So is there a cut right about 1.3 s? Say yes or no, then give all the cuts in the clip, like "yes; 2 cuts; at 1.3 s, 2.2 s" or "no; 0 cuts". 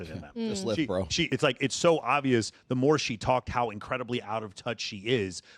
yes; 1 cut; at 1.3 s